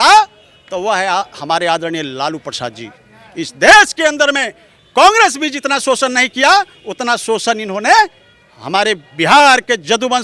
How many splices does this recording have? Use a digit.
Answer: 0